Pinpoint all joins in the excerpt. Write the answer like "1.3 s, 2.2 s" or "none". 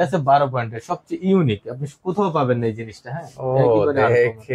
none